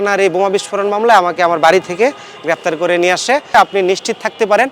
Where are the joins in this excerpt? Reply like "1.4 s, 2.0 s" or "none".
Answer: 3.5 s